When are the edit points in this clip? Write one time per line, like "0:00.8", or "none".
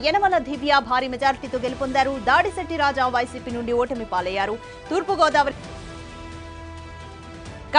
0:05.6